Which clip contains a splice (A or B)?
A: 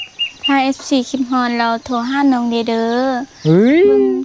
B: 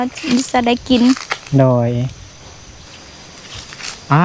B